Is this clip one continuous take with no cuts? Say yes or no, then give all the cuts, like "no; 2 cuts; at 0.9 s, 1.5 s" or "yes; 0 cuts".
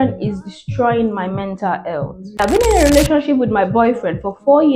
no; 1 cut; at 2.4 s